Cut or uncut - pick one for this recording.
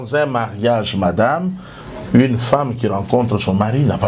uncut